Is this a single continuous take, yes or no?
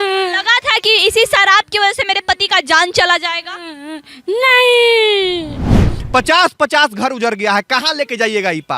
no